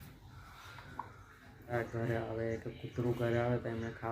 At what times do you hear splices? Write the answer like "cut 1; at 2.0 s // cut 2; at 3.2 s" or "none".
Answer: cut 1; at 1.7 s

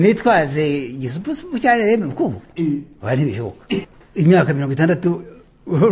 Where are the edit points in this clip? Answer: cut 1; at 3.8 s

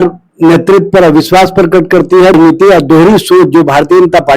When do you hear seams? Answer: cut 1; at 2.3 s

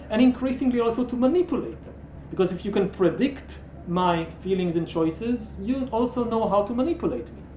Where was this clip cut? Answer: none

